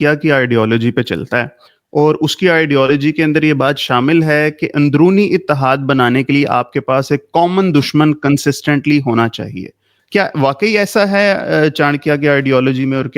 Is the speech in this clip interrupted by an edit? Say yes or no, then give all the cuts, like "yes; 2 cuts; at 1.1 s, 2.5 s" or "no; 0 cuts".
yes; 1 cut; at 10.0 s